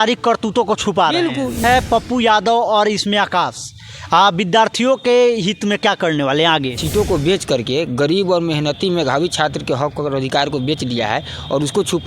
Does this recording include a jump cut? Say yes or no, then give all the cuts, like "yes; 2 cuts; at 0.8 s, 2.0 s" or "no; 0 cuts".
yes; 2 cuts; at 1.6 s, 6.8 s